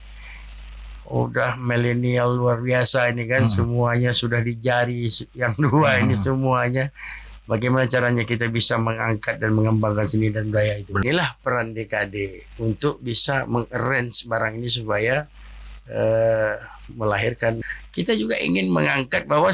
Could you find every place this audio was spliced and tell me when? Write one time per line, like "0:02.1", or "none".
0:11.0
0:17.8